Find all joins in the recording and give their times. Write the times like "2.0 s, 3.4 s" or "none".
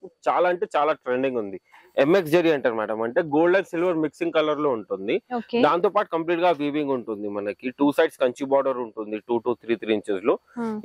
none